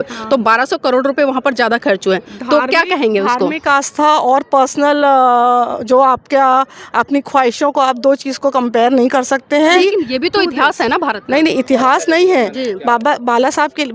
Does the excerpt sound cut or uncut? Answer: cut